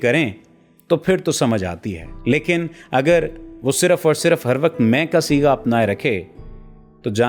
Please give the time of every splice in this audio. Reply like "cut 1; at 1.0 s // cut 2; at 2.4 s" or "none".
none